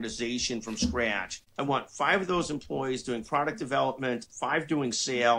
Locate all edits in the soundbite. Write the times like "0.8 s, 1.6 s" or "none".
none